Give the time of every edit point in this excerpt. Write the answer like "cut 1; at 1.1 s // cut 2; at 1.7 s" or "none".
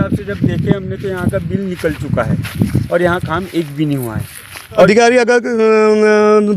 cut 1; at 4.9 s